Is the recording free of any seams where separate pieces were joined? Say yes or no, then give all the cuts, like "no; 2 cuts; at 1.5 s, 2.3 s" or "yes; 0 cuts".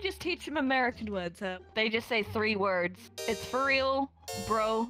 no; 1 cut; at 1.5 s